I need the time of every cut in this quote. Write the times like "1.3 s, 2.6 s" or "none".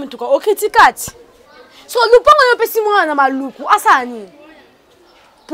none